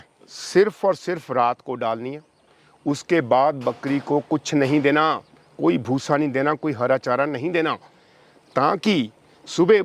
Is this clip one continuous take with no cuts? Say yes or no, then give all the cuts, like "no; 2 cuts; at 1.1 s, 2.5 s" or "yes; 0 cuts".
yes; 0 cuts